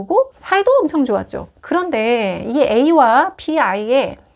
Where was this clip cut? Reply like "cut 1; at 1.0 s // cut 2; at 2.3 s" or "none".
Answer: none